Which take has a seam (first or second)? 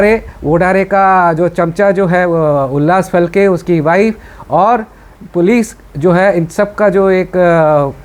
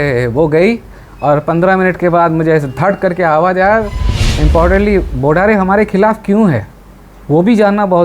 second